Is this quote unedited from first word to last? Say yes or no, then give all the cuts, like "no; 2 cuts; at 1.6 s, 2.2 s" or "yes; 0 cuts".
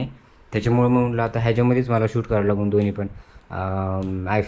yes; 0 cuts